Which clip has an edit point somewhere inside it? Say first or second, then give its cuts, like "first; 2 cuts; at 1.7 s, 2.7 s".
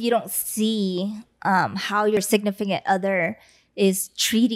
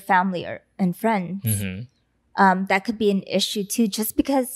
first; 1 cut; at 2.2 s